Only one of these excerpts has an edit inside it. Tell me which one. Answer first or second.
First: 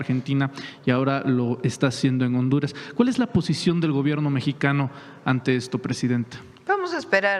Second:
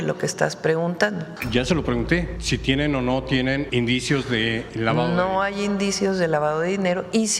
second